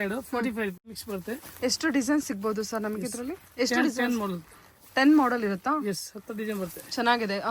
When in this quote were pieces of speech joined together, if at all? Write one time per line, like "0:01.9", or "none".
0:01.0